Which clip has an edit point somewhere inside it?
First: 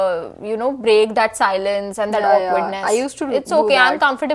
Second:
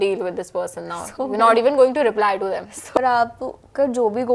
second; 1 cut; at 3.0 s

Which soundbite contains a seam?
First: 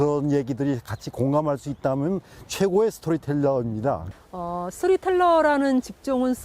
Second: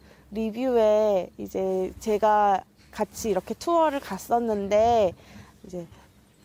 first; 1 cut; at 4.1 s

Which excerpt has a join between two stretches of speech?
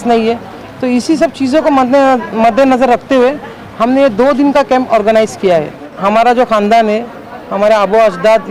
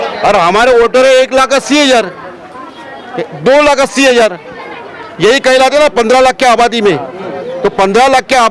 first; 1 cut; at 5.9 s

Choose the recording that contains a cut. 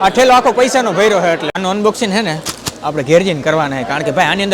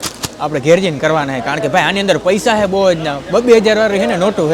first; 1 cut; at 1.5 s

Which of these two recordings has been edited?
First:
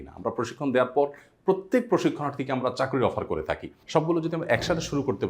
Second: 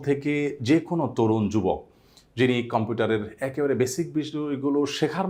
first; 1 cut; at 3.7 s

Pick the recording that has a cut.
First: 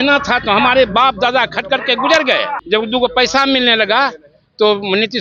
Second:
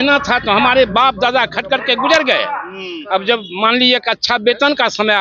first; 1 cut; at 2.6 s

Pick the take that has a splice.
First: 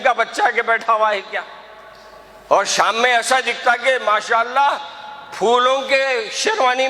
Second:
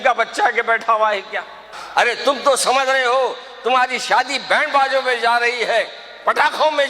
second; 1 cut; at 1.8 s

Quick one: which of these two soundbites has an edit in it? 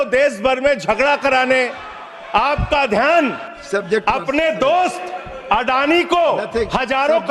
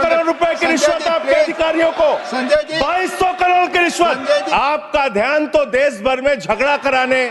second; 1 cut; at 4.4 s

